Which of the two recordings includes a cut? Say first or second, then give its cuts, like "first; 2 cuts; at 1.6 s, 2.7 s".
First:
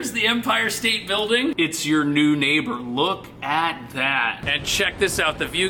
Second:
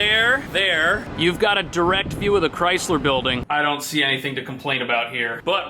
second; 1 cut; at 3.4 s